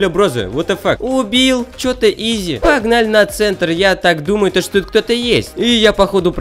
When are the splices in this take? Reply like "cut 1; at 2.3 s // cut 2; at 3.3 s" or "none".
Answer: none